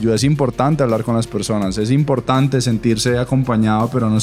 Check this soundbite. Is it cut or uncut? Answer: uncut